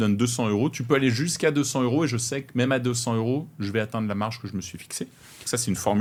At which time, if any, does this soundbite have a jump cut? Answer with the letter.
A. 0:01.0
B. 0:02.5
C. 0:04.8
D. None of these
D